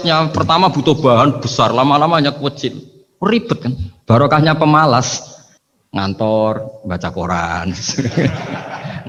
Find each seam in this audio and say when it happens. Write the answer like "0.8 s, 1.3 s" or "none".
none